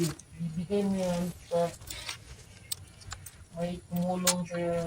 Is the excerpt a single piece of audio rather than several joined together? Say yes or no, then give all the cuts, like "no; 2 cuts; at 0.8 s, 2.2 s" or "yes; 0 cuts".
yes; 0 cuts